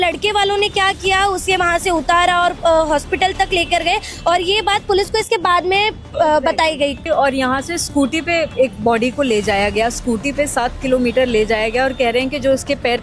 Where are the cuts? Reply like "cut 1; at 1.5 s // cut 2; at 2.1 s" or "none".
cut 1; at 7.0 s